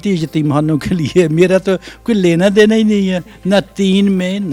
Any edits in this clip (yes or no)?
no